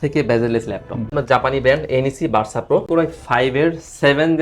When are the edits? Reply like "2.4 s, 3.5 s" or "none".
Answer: 1.1 s, 2.9 s